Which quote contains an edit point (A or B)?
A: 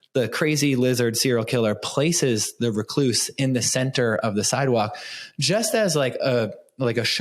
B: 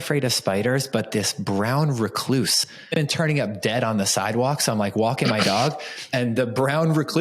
B